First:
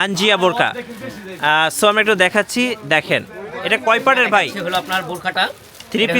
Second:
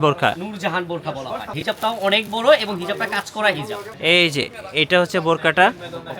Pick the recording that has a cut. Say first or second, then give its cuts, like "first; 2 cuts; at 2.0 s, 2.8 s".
second; 2 cuts; at 1.5 s, 3.9 s